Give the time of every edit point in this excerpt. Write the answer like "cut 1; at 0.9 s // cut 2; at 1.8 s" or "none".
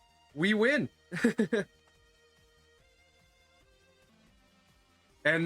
cut 1; at 4.1 s